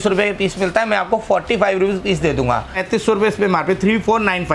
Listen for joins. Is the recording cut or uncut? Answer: cut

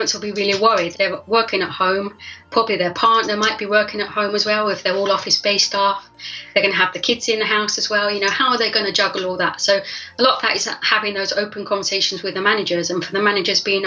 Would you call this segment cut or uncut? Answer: cut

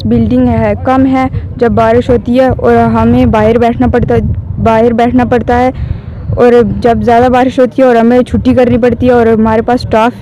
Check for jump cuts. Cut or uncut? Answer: uncut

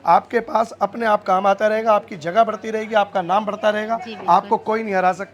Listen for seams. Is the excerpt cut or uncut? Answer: uncut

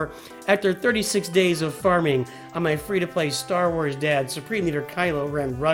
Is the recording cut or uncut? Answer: uncut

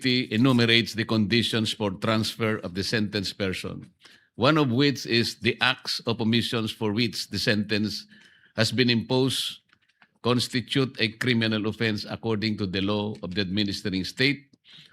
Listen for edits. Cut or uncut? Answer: uncut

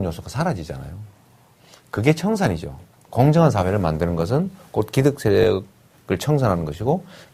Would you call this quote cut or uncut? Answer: cut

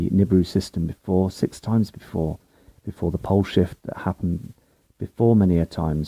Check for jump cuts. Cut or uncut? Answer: uncut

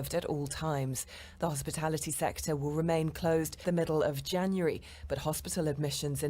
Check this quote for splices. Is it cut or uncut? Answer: cut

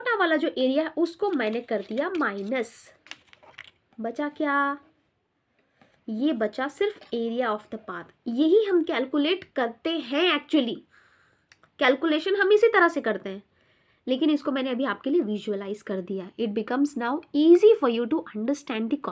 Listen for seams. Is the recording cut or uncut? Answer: uncut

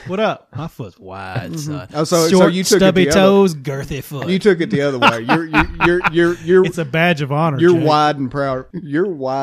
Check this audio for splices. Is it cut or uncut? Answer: uncut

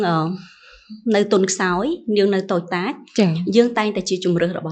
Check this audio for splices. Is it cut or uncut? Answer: uncut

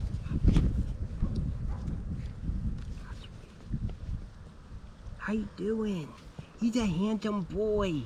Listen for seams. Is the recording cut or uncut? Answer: uncut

